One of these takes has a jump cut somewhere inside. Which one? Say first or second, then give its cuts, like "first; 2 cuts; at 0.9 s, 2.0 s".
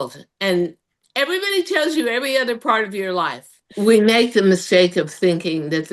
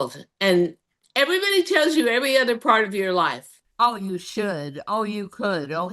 first; 1 cut; at 3.6 s